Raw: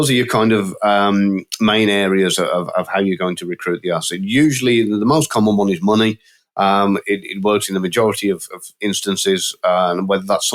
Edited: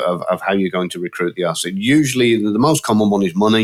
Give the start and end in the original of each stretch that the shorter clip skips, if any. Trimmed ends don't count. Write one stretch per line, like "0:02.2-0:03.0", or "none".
none